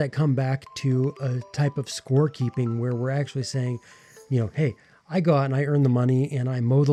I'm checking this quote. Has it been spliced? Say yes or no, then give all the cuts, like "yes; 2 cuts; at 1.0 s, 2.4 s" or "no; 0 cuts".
no; 0 cuts